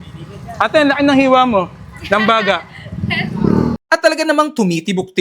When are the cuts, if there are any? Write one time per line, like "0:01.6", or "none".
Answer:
0:03.7